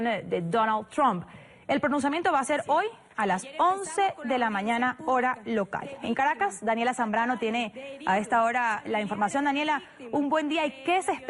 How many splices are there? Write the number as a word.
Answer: one